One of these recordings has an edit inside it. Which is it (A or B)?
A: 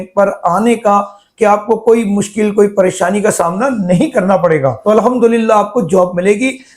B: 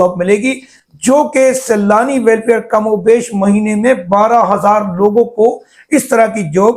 A